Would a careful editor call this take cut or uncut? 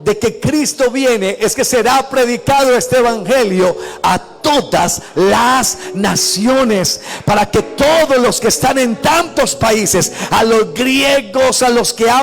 uncut